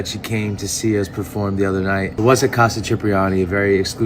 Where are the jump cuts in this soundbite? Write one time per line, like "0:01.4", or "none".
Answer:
0:02.1